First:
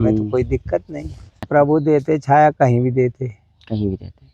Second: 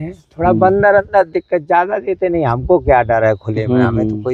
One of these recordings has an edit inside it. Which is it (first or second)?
first